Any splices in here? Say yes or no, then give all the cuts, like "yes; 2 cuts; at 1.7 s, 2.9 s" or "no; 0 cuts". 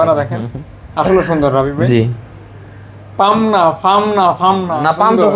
no; 0 cuts